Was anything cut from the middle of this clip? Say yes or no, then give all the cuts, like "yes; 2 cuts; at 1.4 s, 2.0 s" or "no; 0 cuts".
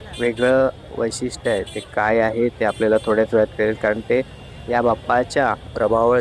no; 0 cuts